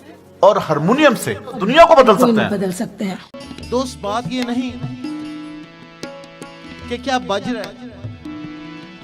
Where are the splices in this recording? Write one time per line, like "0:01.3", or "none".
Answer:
0:01.6
0:03.5